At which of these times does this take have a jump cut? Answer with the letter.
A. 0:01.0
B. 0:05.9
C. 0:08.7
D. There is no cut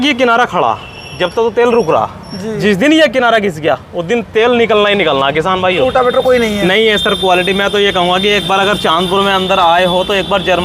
B